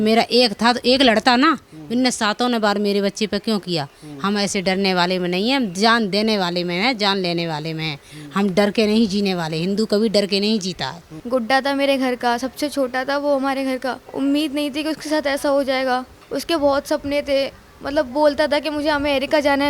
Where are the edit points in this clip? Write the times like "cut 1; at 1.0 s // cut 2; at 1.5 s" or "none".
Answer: cut 1; at 11.1 s // cut 2; at 14.0 s // cut 3; at 16.2 s

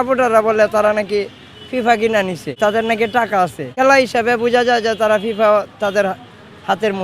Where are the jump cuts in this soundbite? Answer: cut 1; at 2.5 s // cut 2; at 3.7 s

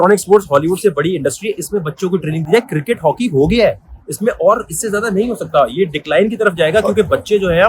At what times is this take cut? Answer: none

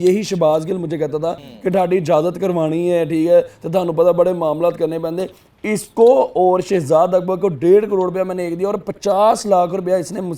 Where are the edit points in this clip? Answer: cut 1; at 1.5 s

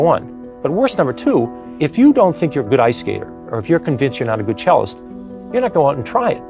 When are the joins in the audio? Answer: cut 1; at 1.6 s

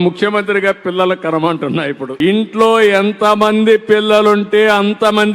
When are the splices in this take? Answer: cut 1; at 2.2 s

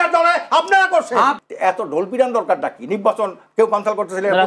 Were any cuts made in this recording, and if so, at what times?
cut 1; at 1.4 s

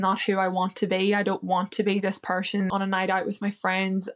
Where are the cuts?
cut 1; at 2.7 s

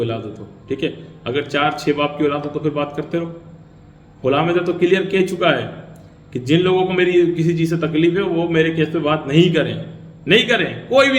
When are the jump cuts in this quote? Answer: none

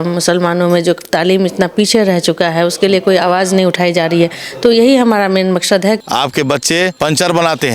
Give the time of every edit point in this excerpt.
cut 1; at 6.0 s // cut 2; at 6.9 s

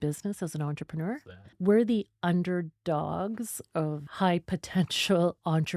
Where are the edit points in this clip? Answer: cut 1; at 1.6 s // cut 2; at 4.1 s

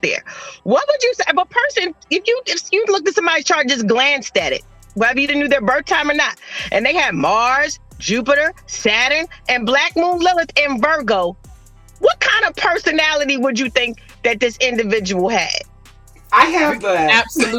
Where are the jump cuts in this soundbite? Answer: none

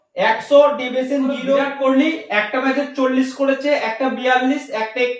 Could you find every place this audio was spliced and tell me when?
cut 1; at 1.7 s

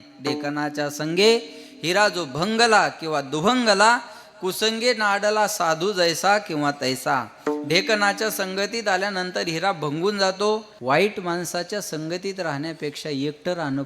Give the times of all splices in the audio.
cut 1; at 10.7 s

